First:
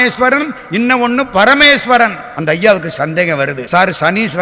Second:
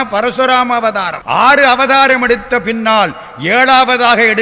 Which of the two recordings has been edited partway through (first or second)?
first